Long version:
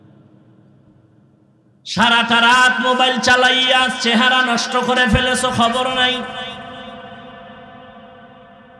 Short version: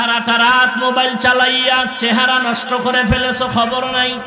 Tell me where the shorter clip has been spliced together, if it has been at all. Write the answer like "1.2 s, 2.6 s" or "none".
none

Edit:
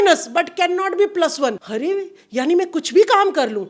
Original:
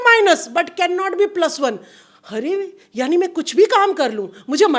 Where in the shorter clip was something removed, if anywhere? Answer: 1.6 s

